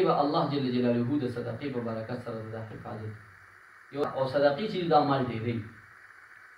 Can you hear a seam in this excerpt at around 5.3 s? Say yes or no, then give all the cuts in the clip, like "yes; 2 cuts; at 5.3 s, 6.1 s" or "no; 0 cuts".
no; 1 cut; at 4.0 s